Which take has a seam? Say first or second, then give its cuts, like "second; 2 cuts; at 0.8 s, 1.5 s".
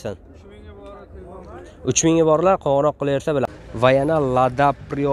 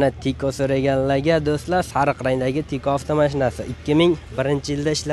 first; 1 cut; at 3.5 s